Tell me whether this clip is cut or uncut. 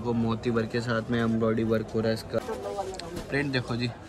cut